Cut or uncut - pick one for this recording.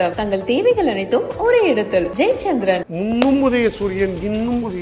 cut